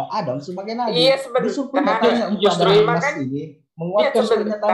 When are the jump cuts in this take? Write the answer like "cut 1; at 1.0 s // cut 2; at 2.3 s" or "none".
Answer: none